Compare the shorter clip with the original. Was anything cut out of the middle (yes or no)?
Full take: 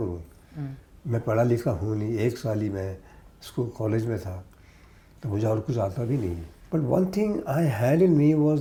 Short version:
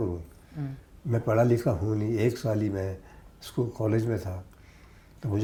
no